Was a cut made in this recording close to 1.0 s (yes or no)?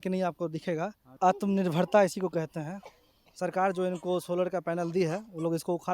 yes